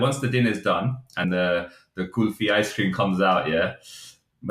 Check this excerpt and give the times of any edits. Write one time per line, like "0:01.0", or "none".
0:01.2